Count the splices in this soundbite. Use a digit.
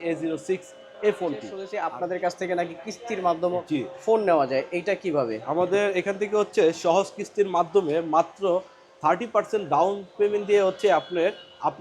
1